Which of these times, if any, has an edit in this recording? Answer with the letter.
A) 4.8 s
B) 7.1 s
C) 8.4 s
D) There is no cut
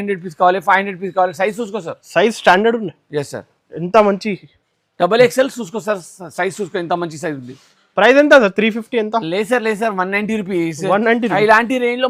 D